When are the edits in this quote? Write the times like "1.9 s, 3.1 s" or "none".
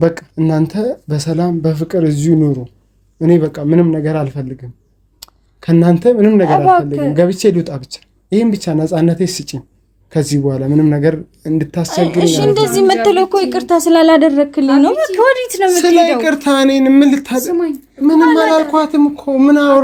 none